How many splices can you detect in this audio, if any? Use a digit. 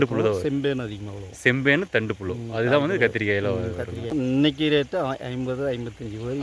1